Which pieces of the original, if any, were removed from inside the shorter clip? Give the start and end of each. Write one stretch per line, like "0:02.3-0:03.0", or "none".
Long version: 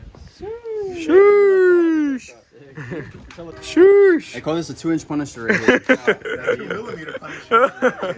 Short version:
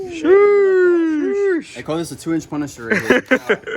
0:02.2-0:04.0